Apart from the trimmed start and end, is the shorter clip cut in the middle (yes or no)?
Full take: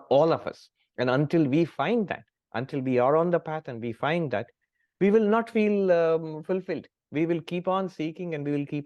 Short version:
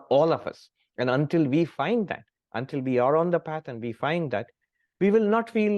no